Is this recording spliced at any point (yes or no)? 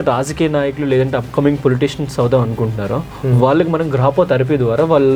no